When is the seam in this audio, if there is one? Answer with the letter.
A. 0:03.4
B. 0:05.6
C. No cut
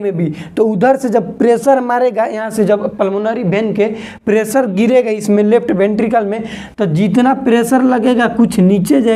C